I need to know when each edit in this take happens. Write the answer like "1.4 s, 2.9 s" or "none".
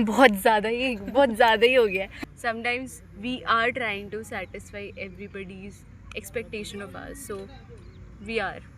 2.2 s